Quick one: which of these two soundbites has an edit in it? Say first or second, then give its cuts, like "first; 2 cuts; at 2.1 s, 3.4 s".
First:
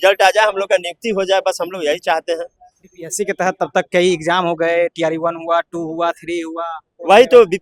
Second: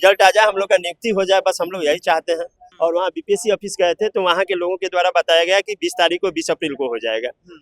second; 1 cut; at 2.6 s